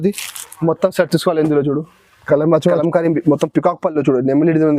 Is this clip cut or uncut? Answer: cut